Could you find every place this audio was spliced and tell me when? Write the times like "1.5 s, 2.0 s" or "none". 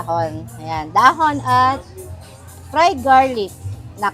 none